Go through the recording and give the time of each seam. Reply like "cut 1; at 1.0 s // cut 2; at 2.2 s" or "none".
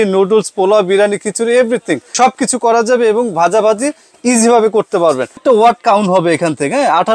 cut 1; at 2.0 s // cut 2; at 5.3 s